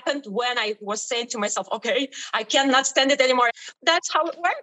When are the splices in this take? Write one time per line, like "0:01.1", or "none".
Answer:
0:03.6